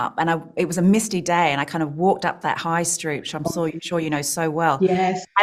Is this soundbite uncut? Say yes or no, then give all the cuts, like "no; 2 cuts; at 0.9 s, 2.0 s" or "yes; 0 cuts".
yes; 0 cuts